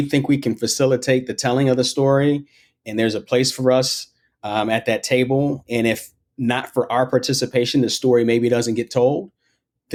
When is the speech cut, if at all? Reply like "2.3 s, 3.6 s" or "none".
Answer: none